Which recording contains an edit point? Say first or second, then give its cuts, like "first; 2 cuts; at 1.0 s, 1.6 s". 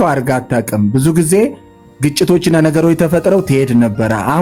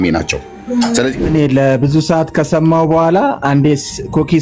second; 1 cut; at 1.2 s